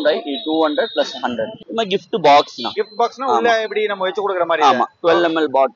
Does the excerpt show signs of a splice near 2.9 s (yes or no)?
no